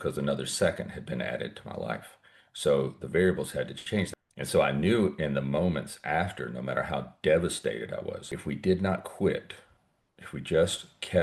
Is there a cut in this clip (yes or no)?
yes